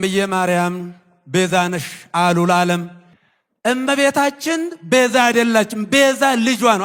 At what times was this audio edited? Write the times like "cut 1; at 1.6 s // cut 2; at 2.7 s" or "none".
none